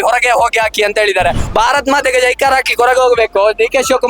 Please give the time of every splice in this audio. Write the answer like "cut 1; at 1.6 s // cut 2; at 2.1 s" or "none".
cut 1; at 1.4 s